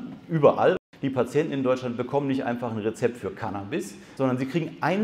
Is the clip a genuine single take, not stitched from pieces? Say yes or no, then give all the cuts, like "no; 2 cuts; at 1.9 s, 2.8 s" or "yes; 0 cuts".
no; 2 cuts; at 0.8 s, 4.0 s